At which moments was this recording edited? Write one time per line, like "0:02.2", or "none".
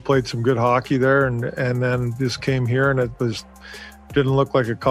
none

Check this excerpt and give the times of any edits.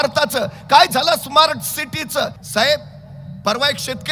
0:02.4

